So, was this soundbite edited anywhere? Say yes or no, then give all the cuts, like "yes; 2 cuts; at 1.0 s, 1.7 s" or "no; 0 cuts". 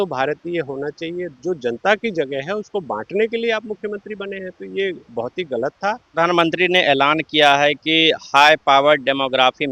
yes; 2 cuts; at 1.3 s, 6.1 s